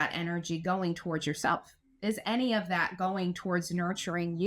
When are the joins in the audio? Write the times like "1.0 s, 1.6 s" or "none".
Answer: none